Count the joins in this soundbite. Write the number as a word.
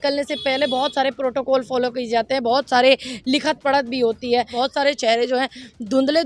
one